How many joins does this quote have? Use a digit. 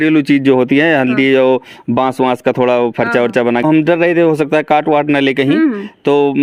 1